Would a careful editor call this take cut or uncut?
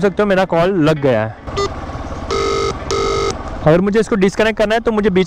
uncut